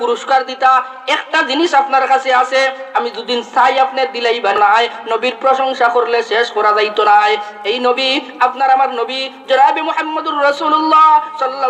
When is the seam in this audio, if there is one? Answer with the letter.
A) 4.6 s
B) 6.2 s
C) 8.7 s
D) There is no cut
A